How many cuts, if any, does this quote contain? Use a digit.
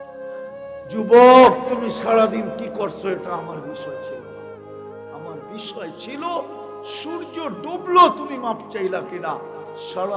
1